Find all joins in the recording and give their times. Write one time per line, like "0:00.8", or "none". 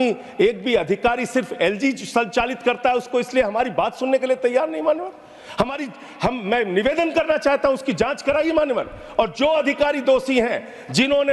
none